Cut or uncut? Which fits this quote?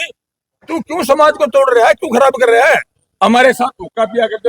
cut